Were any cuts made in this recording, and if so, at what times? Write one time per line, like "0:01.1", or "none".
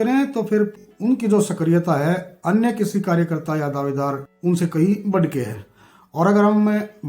0:00.8
0:04.3